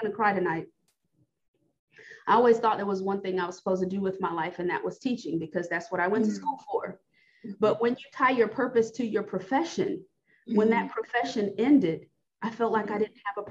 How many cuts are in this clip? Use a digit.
1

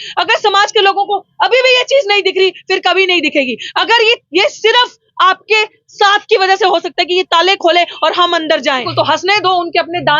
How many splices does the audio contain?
1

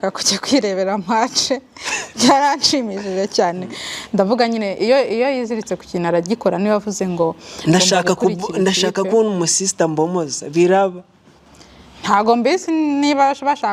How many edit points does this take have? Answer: 0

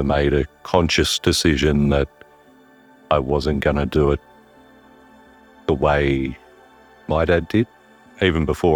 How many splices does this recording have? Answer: 1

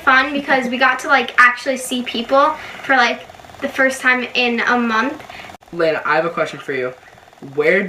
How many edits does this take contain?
1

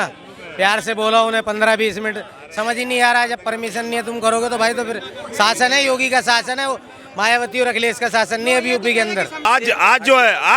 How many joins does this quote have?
1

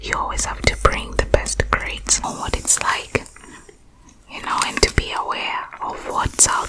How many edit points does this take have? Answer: 1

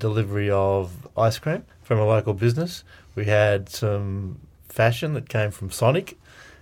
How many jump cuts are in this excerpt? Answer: 1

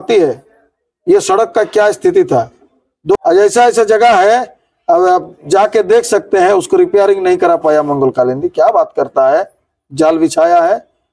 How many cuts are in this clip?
1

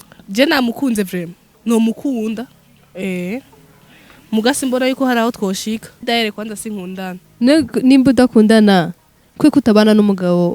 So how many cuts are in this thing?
2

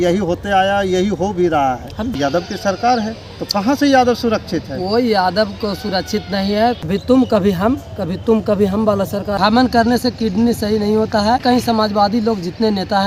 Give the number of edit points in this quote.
4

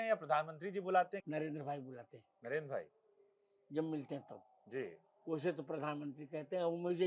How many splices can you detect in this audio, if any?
1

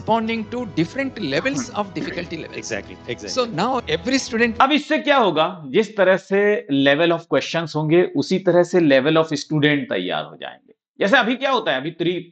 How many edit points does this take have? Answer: 0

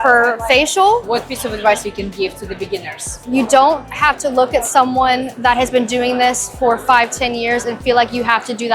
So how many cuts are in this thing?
3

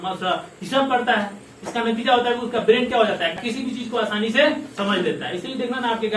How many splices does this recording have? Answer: 1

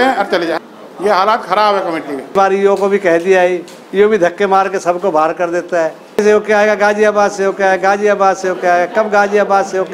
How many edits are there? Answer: 2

